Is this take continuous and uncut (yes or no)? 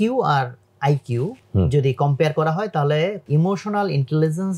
no